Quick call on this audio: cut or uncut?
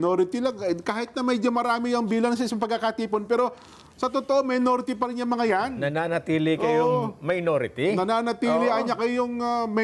uncut